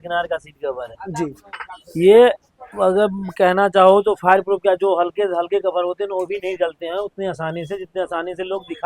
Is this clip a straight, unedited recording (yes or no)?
yes